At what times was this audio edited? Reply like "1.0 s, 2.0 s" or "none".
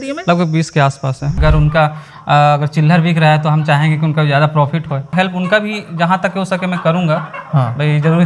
1.4 s, 5.1 s